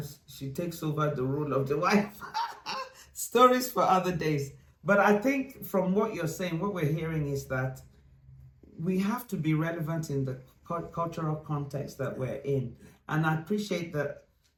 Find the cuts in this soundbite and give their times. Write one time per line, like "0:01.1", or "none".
none